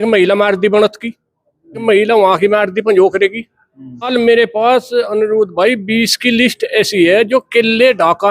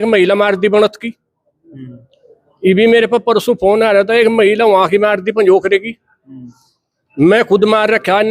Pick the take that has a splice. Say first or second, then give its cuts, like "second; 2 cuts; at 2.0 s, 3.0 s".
first; 2 cuts; at 1.8 s, 4.1 s